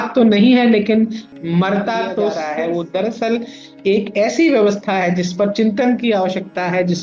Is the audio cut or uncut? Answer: cut